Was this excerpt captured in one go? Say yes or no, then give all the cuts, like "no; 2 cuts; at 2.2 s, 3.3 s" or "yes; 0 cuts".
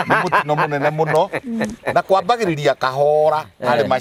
yes; 0 cuts